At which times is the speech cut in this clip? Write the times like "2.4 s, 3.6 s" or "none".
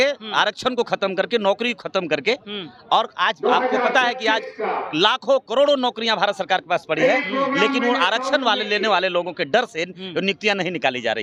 none